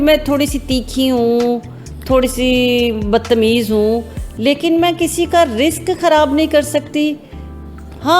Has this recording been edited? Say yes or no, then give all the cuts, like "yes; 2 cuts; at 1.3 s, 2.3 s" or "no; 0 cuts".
no; 0 cuts